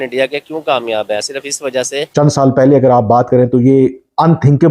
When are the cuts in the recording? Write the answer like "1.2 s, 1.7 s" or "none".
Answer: 2.1 s